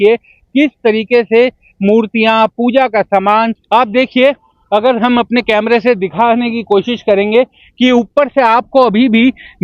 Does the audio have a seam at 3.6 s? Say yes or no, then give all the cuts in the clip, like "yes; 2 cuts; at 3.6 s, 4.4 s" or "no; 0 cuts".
yes; 1 cut; at 3.6 s